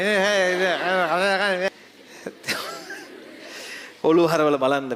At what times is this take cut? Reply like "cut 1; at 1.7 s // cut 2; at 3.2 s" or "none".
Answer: cut 1; at 1.7 s

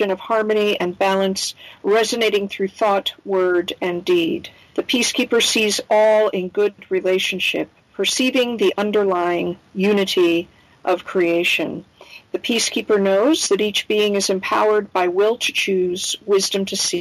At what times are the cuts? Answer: cut 1; at 6.8 s

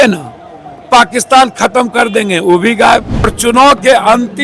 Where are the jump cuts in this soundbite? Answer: cut 1; at 3.3 s

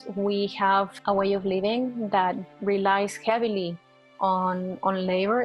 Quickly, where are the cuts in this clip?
cut 1; at 0.9 s

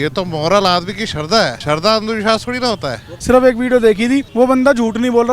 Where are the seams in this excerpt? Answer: cut 1; at 1.6 s // cut 2; at 3.1 s // cut 3; at 4.3 s

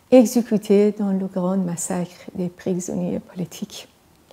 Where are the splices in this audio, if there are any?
none

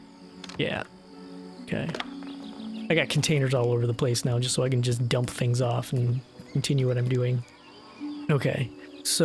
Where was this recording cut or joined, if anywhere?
cut 1; at 8.2 s

